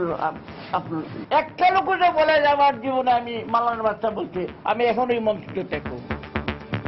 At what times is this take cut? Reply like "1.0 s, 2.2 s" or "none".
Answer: 5.9 s